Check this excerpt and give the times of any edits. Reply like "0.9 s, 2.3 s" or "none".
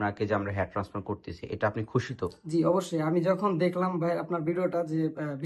none

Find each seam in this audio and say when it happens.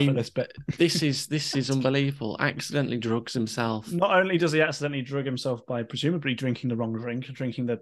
none

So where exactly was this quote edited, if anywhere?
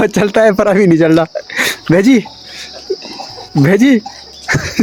none

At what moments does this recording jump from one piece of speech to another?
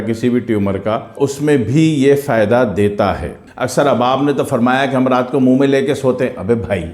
3.5 s

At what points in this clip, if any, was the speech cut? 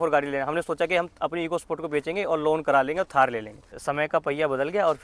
3.8 s

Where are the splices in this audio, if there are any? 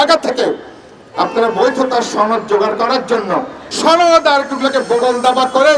3.6 s

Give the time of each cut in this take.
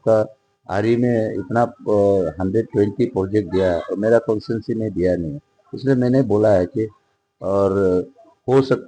none

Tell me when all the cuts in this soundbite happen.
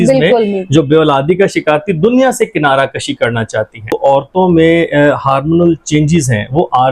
4.0 s

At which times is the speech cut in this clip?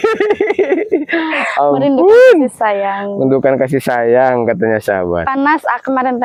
none

